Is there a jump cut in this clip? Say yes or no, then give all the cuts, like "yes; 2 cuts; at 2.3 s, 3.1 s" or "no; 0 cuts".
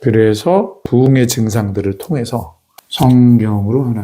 yes; 1 cut; at 1.1 s